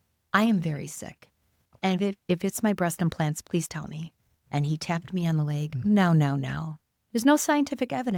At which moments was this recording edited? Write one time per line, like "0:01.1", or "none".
none